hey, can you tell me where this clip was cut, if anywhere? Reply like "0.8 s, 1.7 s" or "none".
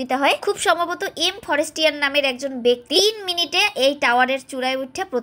none